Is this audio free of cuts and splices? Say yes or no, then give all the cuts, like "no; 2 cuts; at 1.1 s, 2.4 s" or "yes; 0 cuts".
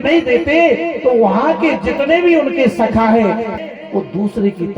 no; 1 cut; at 3.5 s